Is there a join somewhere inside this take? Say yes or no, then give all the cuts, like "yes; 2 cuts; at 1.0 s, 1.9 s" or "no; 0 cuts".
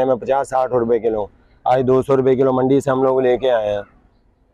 no; 0 cuts